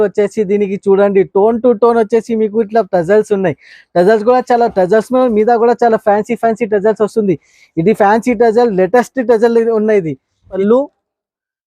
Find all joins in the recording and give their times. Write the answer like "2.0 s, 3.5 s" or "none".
10.5 s